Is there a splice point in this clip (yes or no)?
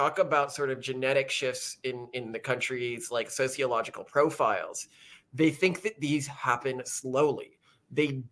no